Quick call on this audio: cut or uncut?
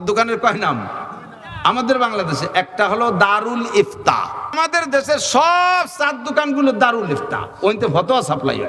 cut